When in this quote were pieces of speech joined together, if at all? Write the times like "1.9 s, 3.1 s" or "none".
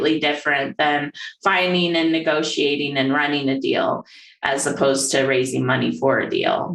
none